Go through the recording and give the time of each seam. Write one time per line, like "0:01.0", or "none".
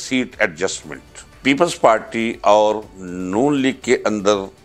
0:01.3